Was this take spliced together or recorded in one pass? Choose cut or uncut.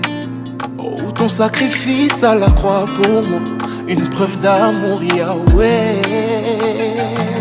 uncut